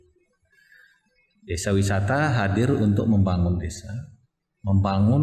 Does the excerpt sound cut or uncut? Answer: uncut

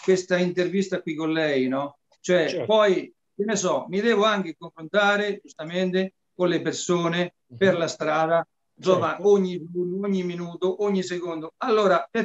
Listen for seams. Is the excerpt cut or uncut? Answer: uncut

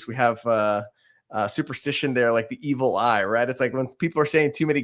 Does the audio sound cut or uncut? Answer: uncut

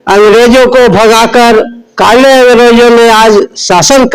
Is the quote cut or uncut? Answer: uncut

